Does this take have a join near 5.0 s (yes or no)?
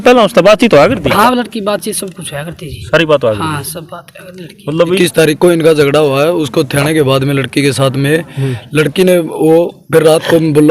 yes